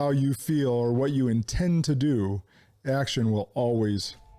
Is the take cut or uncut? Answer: uncut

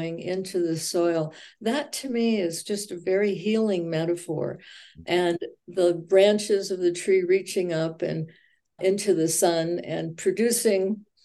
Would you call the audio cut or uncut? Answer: cut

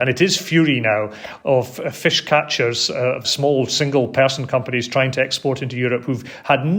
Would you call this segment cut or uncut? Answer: uncut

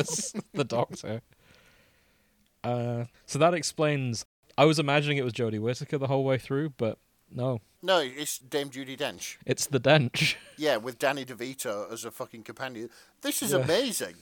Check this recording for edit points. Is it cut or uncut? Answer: cut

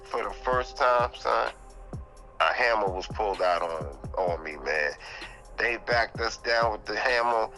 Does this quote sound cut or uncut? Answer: uncut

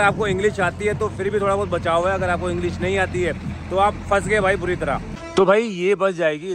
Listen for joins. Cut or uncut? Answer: cut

